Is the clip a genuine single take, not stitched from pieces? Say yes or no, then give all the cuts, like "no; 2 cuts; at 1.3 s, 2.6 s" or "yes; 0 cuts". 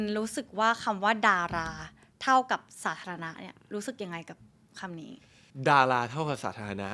yes; 0 cuts